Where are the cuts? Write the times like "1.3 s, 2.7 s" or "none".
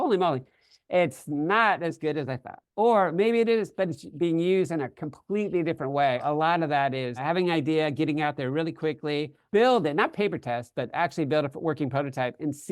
6.2 s, 7.2 s, 9.4 s